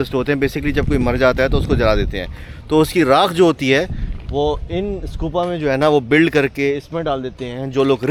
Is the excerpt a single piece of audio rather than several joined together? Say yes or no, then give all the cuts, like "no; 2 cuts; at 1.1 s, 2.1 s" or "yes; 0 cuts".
yes; 0 cuts